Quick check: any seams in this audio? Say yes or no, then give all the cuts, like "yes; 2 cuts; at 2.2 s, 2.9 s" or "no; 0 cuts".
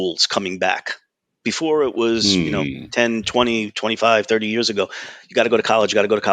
no; 0 cuts